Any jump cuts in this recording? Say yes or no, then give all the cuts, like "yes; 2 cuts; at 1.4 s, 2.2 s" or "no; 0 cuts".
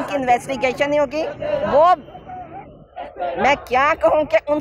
no; 0 cuts